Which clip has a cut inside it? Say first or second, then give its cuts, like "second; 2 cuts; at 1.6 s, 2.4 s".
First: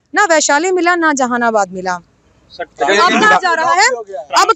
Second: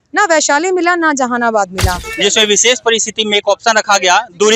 second; 1 cut; at 2.0 s